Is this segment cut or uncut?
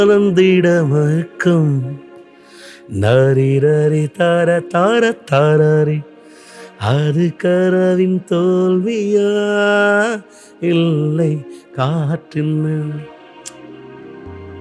uncut